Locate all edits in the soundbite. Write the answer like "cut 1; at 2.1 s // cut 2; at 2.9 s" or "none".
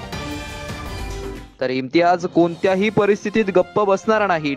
cut 1; at 1.4 s